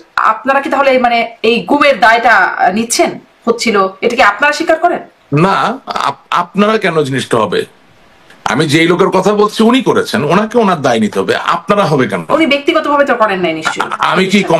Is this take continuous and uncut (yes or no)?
yes